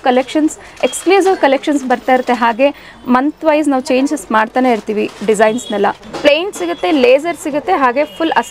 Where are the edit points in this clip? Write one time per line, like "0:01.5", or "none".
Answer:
0:06.1